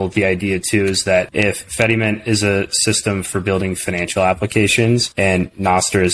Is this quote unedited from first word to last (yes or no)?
no